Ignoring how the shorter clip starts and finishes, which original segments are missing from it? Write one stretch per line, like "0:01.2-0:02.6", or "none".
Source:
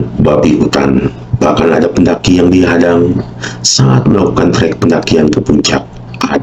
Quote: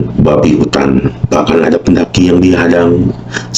0:01.2-0:01.3